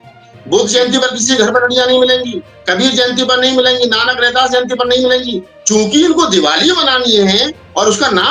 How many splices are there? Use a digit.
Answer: 0